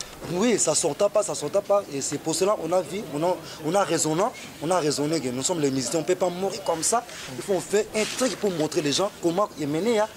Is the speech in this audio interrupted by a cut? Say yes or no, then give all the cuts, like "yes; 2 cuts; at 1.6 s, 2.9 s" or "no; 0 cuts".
no; 0 cuts